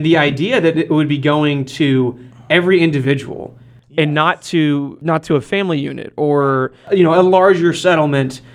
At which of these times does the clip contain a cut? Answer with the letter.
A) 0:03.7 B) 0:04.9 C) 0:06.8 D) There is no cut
B